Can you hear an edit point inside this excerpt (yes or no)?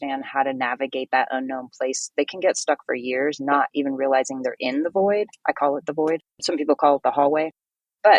no